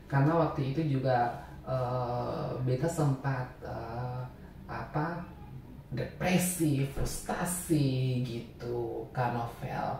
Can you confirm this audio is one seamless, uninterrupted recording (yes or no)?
yes